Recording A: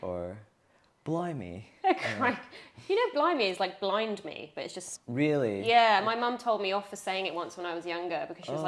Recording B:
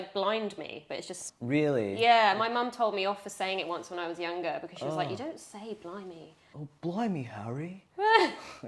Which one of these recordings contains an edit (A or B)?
B